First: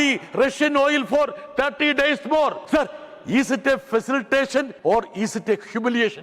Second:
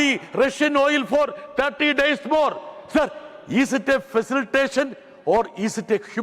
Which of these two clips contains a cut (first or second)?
first